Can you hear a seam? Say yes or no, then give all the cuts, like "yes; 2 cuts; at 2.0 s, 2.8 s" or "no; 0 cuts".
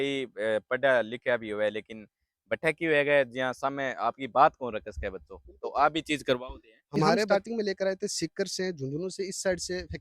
yes; 1 cut; at 7.3 s